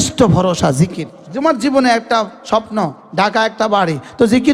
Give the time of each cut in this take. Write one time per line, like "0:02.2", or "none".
0:01.1